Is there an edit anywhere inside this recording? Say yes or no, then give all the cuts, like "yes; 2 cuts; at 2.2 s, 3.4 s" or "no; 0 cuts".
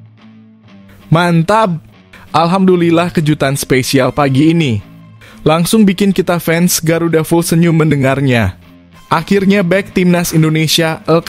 yes; 1 cut; at 1.1 s